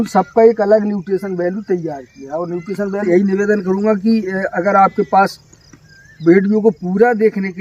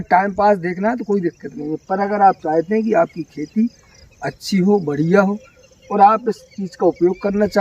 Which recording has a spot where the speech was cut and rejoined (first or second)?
first